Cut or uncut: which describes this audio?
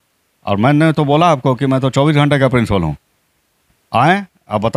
uncut